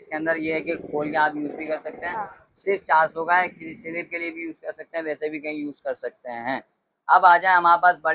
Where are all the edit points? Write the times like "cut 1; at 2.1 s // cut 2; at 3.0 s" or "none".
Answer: none